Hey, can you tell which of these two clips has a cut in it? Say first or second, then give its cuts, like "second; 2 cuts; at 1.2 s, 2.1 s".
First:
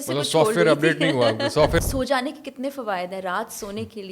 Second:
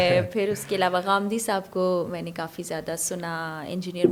first; 1 cut; at 1.8 s